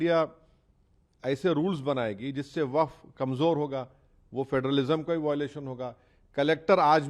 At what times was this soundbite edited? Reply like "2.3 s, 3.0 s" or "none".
none